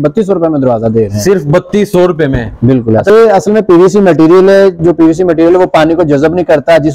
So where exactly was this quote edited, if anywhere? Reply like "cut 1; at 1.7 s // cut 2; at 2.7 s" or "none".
cut 1; at 3.1 s